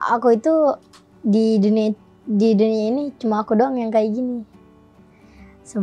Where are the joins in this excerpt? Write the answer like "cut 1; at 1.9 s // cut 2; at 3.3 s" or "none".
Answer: none